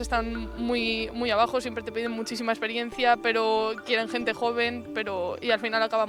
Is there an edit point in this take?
no; 0 cuts

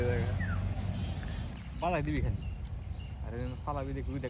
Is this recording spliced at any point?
yes; 1 cut; at 1.5 s

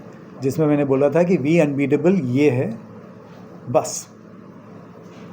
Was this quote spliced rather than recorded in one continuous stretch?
no; 0 cuts

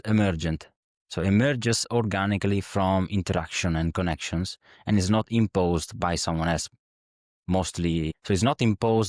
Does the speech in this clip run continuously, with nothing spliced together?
no; 1 cut; at 8.2 s

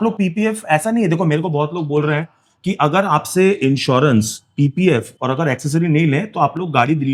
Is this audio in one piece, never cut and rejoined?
yes; 0 cuts

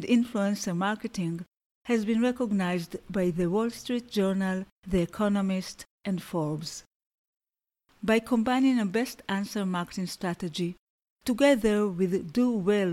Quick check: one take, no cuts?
yes; 0 cuts

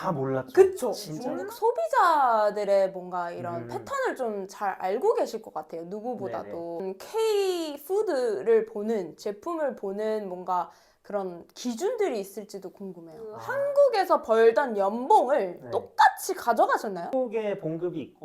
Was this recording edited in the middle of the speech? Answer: yes; 4 cuts; at 1.1 s, 6.8 s, 13.4 s, 17.1 s

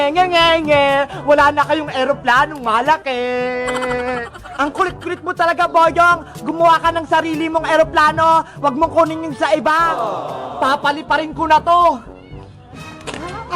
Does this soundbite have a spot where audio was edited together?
no; 0 cuts

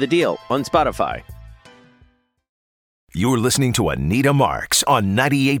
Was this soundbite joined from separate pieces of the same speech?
yes; 1 cut; at 3.1 s

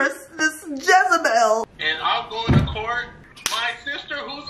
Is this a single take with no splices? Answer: no; 2 cuts; at 1.7 s, 3.0 s

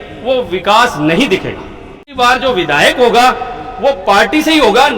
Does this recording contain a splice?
yes; 1 cut; at 2.1 s

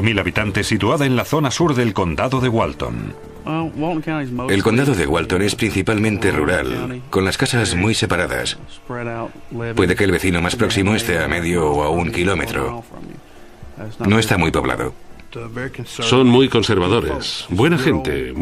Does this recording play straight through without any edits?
no; 1 cut; at 8.7 s

